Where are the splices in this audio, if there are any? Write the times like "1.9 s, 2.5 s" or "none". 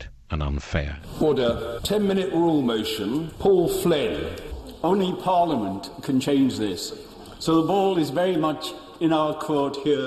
1.0 s, 1.8 s, 3.3 s